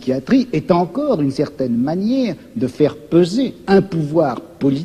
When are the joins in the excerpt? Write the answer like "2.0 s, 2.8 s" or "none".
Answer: none